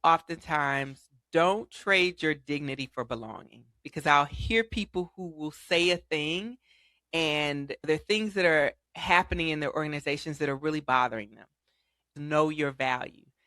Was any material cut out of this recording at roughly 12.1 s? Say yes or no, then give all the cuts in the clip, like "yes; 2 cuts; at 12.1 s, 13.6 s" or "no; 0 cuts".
yes; 1 cut; at 12.1 s